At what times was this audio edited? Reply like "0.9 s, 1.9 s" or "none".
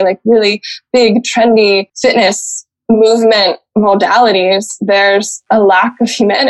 1.9 s, 5.4 s